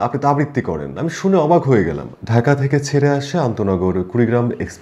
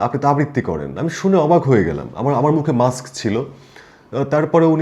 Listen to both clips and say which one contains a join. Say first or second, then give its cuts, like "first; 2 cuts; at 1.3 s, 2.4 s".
first; 1 cut; at 2.1 s